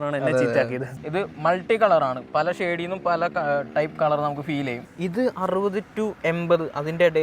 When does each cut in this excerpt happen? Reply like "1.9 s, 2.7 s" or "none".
0.9 s, 4.8 s